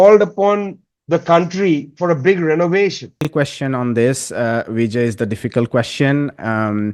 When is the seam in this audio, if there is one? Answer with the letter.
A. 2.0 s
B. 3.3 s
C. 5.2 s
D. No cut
B